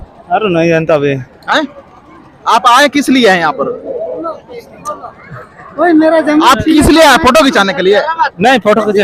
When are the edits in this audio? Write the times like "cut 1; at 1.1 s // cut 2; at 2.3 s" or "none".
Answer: none